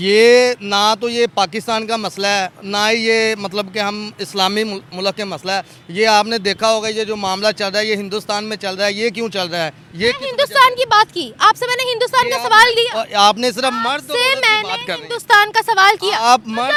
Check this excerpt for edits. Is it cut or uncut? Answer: uncut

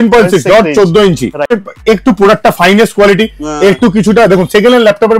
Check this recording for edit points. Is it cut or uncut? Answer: cut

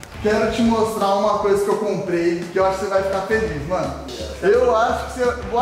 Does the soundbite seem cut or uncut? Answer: cut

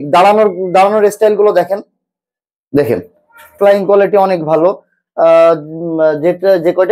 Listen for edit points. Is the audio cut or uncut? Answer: cut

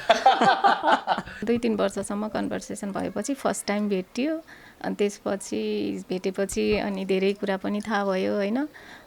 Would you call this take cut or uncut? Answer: cut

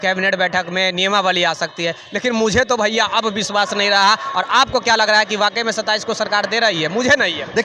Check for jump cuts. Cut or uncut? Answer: uncut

